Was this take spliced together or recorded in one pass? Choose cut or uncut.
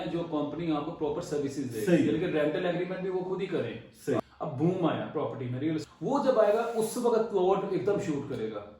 cut